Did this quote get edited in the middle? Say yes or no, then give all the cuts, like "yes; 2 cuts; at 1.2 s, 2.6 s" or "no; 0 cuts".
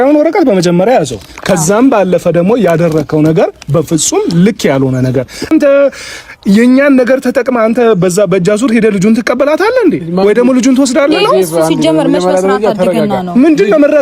yes; 1 cut; at 5.5 s